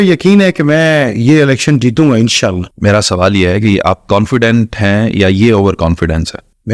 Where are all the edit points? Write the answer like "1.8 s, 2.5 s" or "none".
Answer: 2.7 s